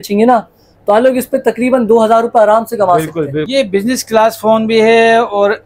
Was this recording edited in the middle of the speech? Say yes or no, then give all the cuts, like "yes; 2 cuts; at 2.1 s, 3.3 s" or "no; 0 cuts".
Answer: yes; 1 cut; at 3.5 s